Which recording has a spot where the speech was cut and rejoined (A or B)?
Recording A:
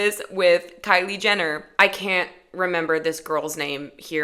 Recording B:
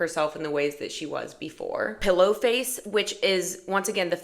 B